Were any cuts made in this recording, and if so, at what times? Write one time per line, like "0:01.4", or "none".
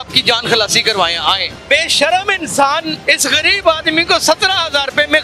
0:01.5
0:02.9